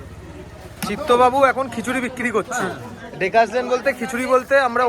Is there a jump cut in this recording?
no; 0 cuts

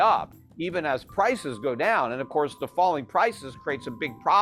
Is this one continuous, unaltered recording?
yes; 0 cuts

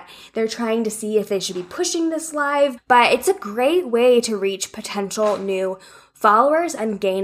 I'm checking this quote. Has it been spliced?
yes; 1 cut; at 2.8 s

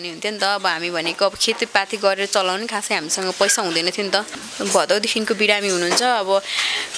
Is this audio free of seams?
no; 1 cut; at 4.4 s

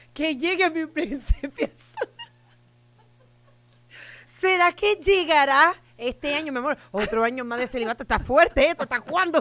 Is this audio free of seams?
yes; 0 cuts

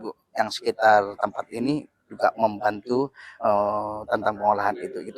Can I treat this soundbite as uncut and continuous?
yes; 0 cuts

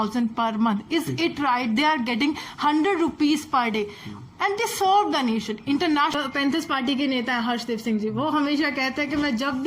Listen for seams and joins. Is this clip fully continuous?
no; 1 cut; at 6.1 s

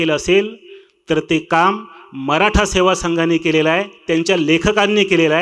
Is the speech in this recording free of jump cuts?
yes; 0 cuts

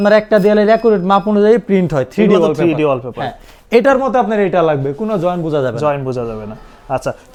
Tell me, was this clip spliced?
no; 0 cuts

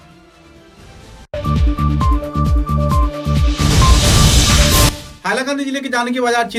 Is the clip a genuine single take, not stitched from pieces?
yes; 0 cuts

